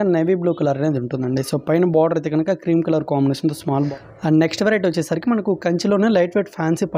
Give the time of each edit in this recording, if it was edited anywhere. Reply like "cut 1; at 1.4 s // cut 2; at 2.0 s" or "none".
cut 1; at 3.9 s